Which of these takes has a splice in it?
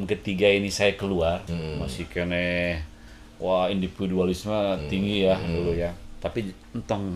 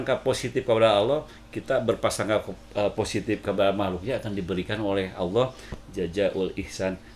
first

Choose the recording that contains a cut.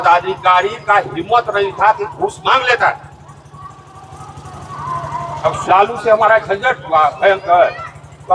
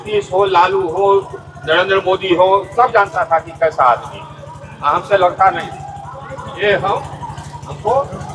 first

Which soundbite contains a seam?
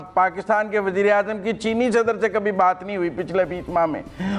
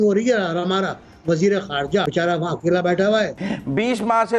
second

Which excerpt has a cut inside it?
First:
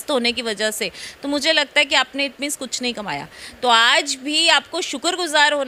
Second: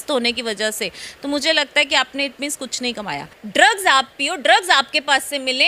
second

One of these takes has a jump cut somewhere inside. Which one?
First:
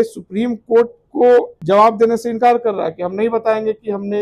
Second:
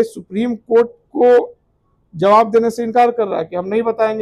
first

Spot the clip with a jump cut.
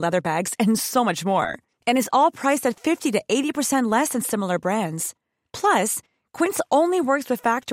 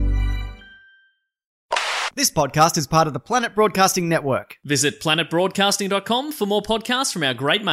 second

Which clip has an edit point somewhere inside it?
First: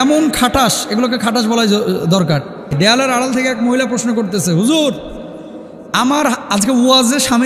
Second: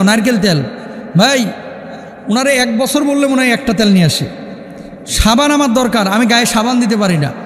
first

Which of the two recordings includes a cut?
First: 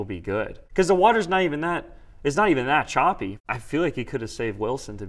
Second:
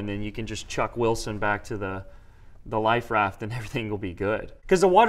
first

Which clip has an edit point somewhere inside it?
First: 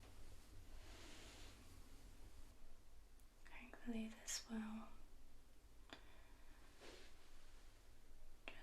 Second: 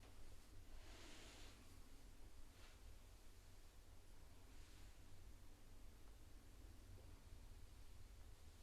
first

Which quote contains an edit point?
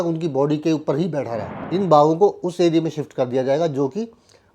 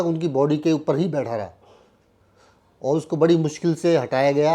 first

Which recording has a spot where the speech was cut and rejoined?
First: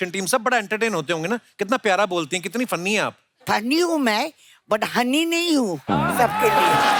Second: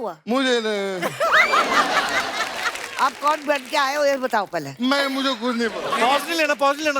second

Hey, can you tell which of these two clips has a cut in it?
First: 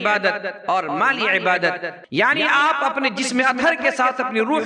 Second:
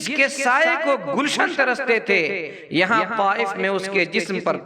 first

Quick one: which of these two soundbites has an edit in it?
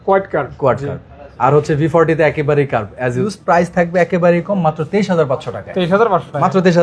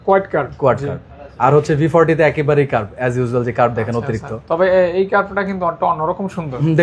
first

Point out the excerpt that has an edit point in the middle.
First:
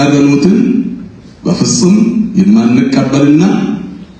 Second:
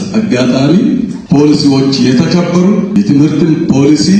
second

